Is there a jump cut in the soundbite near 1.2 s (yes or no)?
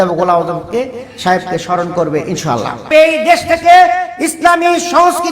no